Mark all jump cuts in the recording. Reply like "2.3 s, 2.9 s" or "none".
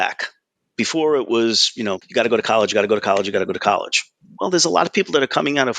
1.6 s